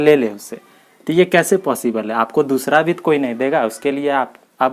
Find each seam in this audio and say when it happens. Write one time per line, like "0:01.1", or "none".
none

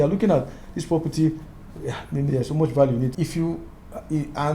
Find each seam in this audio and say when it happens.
0:03.1

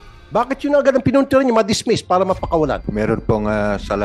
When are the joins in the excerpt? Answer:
0:02.8

